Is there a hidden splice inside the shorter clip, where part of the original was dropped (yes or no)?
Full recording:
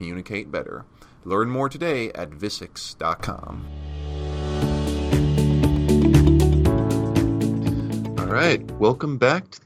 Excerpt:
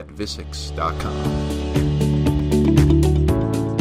yes